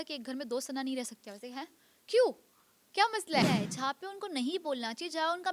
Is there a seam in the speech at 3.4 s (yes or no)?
yes